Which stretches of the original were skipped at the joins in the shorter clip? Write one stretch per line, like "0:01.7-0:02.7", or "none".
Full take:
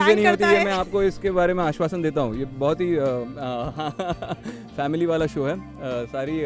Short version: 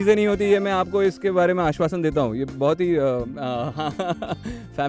none